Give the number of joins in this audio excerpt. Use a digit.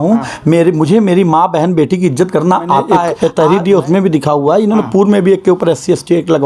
1